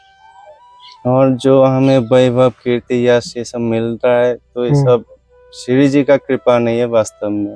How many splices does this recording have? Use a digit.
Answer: 0